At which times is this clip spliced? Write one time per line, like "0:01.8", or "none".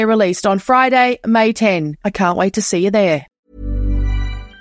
0:03.4